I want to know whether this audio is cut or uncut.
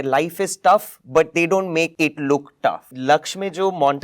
cut